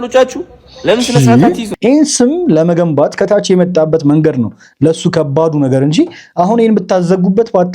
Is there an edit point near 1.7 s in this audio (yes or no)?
yes